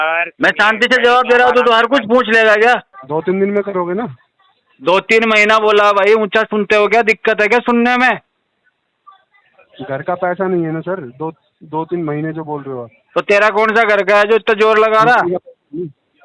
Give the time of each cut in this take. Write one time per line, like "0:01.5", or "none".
0:03.0